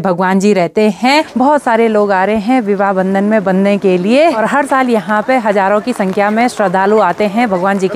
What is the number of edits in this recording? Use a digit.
2